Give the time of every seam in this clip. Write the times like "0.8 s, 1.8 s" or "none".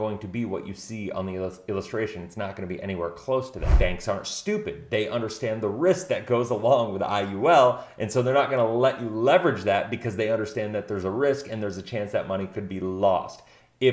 3.6 s